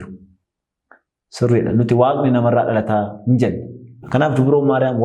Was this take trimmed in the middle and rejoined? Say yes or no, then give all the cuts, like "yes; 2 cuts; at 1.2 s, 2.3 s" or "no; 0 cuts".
yes; 1 cut; at 4.0 s